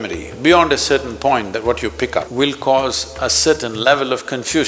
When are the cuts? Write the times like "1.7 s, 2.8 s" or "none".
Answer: 2.3 s